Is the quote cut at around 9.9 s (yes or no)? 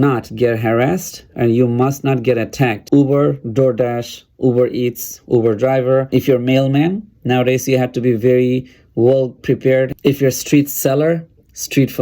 yes